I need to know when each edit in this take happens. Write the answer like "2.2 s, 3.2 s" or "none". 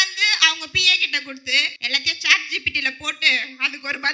1.7 s